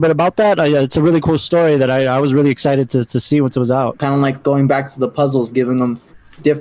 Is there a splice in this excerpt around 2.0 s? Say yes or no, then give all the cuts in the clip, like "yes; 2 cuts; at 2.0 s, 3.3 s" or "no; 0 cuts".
no; 1 cut; at 4.0 s